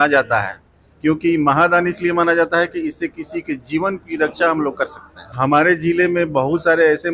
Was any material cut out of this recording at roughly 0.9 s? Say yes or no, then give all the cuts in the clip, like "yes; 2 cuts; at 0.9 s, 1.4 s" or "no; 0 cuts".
no; 1 cut; at 5.3 s